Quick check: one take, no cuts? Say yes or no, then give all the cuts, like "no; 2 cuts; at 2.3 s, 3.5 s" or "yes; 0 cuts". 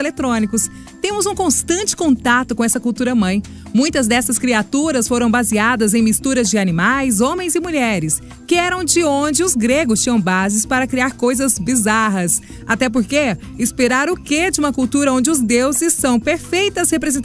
no; 1 cut; at 15.8 s